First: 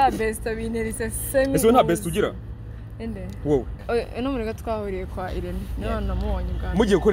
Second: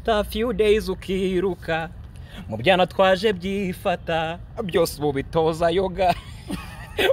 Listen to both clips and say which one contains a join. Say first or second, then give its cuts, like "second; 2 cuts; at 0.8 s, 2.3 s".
first; 1 cut; at 3.8 s